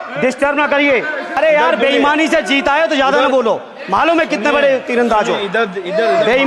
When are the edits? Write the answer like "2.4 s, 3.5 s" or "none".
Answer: 1.4 s